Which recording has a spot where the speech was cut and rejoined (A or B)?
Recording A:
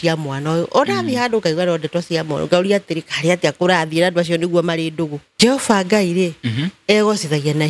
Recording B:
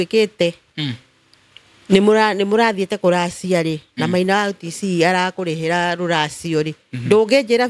A